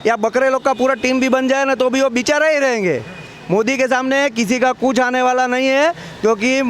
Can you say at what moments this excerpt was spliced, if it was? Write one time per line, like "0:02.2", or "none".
none